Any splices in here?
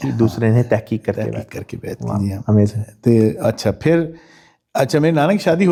no; 0 cuts

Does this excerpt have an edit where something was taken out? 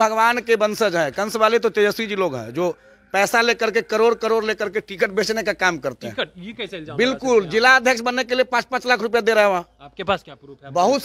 no; 0 cuts

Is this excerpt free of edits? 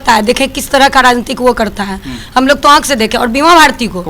yes; 0 cuts

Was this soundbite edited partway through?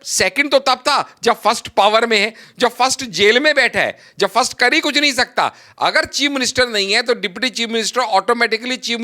no; 0 cuts

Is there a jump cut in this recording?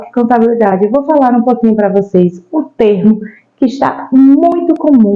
no; 0 cuts

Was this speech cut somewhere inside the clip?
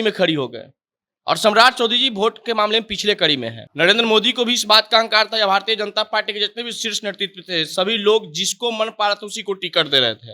yes; 1 cut; at 3.6 s

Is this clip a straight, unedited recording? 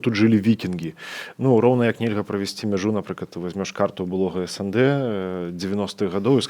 yes; 0 cuts

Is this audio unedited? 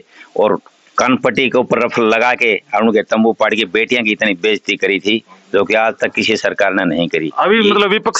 yes; 0 cuts

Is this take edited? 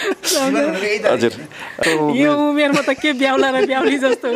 yes; 1 cut; at 1.7 s

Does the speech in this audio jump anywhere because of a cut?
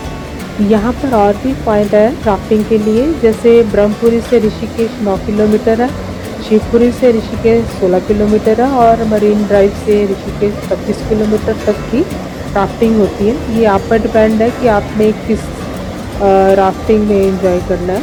no; 0 cuts

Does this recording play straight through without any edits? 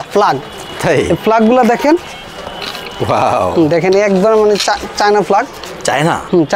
yes; 0 cuts

